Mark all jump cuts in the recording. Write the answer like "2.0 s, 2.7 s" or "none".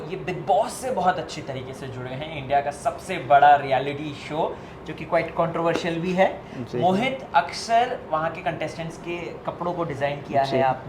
none